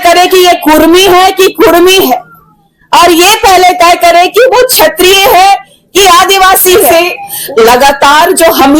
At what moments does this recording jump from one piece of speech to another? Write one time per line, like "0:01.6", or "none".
0:06.9